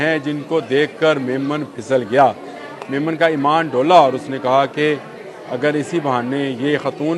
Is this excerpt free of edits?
yes; 0 cuts

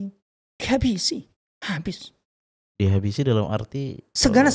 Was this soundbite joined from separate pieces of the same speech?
no; 0 cuts

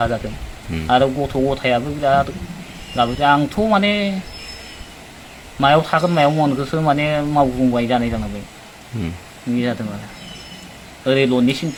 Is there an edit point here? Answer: no; 0 cuts

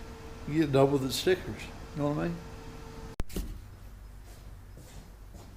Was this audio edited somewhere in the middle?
yes; 1 cut; at 3.1 s

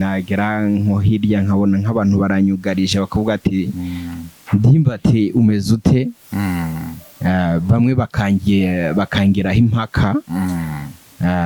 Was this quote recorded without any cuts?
yes; 0 cuts

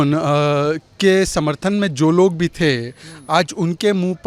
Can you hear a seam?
no; 0 cuts

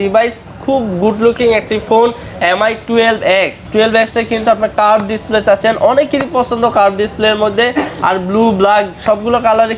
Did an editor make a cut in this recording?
no; 0 cuts

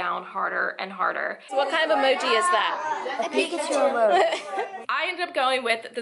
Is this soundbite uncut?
no; 2 cuts; at 1.5 s, 4.8 s

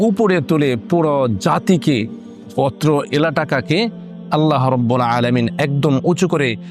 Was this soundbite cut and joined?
no; 0 cuts

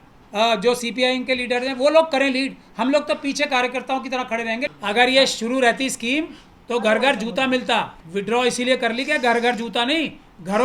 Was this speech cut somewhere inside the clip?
yes; 2 cuts; at 4.7 s, 8.0 s

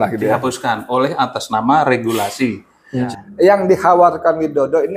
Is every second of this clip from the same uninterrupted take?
no; 1 cut; at 3.0 s

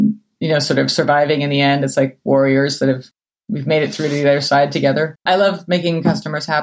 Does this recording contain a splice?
yes; 1 cut; at 5.2 s

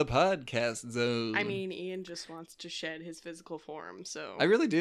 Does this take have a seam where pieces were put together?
no; 0 cuts

